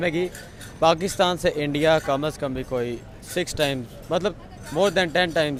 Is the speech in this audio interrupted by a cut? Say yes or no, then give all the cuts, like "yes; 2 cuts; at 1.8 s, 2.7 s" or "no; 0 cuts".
no; 0 cuts